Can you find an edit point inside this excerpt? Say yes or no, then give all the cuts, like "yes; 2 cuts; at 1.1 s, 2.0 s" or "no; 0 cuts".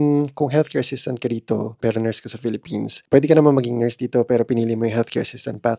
yes; 1 cut; at 1.8 s